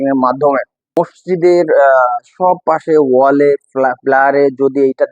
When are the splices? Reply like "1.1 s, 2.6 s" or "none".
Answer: 0.9 s